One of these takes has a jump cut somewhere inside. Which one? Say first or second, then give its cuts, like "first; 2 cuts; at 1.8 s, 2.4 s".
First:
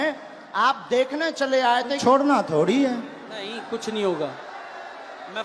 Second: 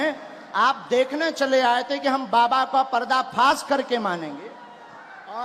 first; 1 cut; at 2.0 s